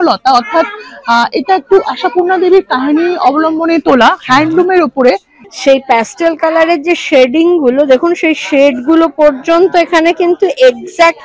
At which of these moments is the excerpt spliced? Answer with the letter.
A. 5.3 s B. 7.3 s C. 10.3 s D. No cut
A